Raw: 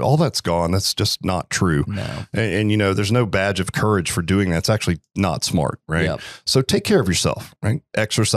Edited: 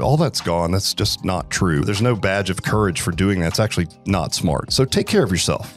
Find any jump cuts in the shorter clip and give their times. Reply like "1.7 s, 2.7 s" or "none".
1.8 s, 4.7 s